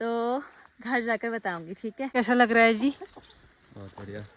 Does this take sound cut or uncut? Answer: cut